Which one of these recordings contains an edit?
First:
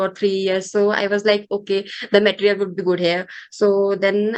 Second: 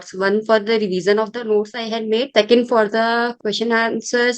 second; 2 cuts; at 2.3 s, 3.3 s

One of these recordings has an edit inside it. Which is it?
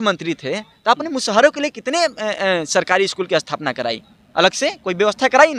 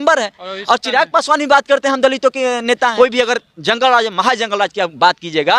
second; 1 cut; at 2.9 s

